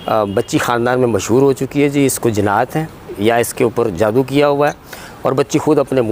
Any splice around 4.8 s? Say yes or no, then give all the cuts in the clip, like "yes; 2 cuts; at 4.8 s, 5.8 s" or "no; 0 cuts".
no; 1 cut; at 3.1 s